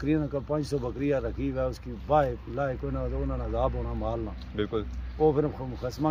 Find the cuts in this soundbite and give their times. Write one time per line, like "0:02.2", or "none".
none